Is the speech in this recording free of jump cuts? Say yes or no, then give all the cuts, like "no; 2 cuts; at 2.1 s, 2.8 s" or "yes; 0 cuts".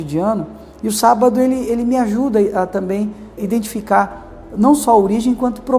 no; 1 cut; at 3.4 s